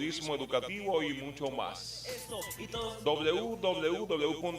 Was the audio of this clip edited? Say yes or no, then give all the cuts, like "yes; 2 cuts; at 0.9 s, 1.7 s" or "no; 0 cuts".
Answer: no; 0 cuts